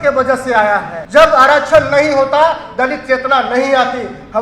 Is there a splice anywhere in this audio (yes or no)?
yes